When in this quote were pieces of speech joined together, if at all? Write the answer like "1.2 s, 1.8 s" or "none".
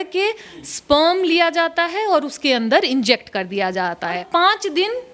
4.2 s

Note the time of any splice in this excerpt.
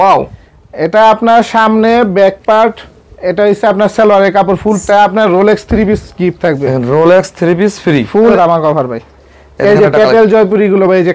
4.8 s, 8.3 s

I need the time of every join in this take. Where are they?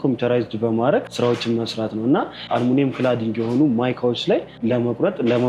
1.1 s, 2.5 s, 4.6 s

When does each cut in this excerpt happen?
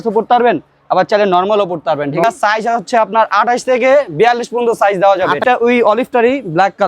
2.2 s, 5.4 s

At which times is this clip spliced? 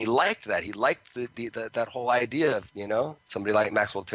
1.3 s

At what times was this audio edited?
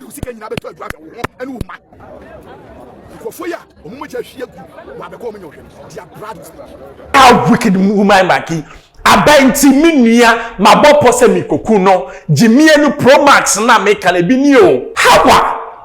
7.0 s, 14.9 s

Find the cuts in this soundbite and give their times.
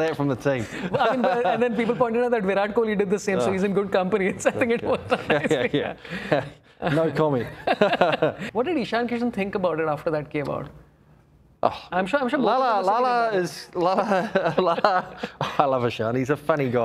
8.4 s

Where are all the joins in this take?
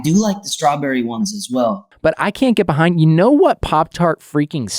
1.9 s

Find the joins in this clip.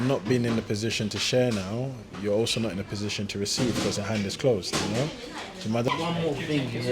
5.9 s

